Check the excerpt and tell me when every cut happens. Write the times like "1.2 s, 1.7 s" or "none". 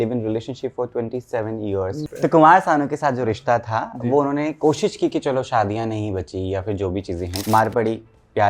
2.0 s, 7.4 s